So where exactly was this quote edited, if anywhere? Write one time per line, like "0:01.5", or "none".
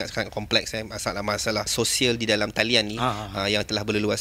0:01.7